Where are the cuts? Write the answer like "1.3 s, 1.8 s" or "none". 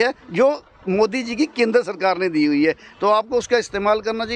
none